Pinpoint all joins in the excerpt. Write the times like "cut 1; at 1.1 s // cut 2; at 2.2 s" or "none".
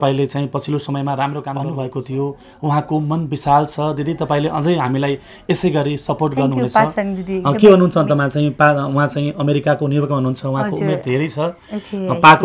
cut 1; at 1.5 s